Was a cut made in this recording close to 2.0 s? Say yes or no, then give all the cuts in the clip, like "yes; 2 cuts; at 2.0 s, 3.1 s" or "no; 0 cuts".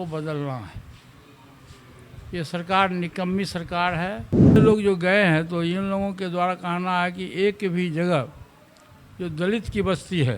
no; 1 cut; at 4.6 s